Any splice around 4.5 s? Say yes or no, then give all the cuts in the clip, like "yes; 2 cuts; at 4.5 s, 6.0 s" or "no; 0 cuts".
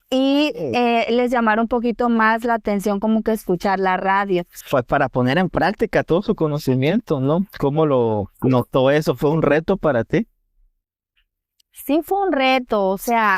yes; 1 cut; at 4.5 s